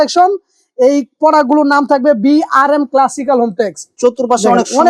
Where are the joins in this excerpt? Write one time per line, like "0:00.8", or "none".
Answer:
0:03.9